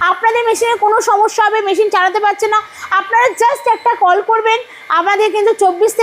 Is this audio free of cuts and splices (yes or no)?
yes